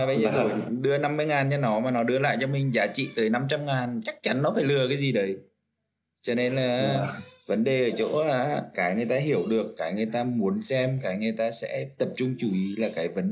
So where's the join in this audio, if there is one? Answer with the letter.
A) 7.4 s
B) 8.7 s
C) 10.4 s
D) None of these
B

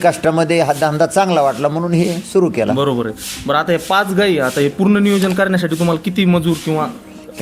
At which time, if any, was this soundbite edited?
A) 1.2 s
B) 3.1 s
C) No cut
C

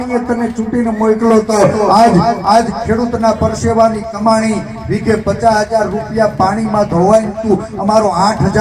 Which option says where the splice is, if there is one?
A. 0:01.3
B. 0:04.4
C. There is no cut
C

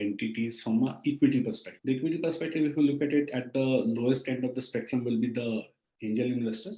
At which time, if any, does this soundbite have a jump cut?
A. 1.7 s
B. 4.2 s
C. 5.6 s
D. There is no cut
A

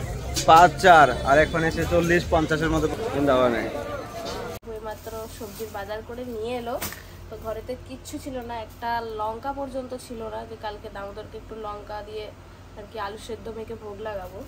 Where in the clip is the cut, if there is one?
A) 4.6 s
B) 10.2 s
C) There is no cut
A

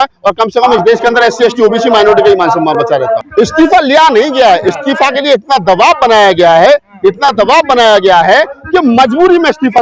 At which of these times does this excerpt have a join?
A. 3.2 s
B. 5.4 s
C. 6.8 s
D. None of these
A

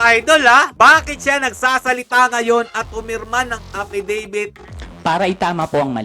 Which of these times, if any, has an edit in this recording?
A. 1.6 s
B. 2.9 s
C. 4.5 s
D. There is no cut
C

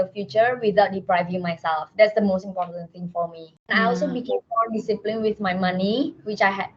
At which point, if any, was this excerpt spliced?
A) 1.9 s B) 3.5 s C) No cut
B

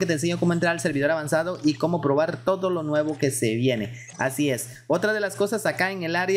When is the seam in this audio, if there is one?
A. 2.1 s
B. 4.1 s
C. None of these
C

